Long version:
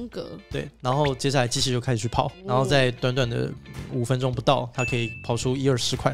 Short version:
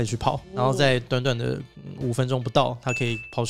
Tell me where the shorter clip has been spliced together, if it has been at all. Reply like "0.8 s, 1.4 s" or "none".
none